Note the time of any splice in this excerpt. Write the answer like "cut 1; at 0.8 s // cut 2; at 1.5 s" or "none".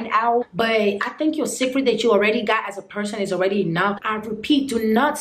cut 1; at 4.0 s